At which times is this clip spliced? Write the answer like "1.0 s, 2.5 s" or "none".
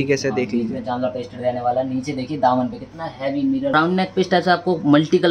3.7 s